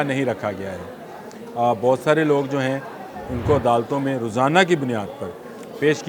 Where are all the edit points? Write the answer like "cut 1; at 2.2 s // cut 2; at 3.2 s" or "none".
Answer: none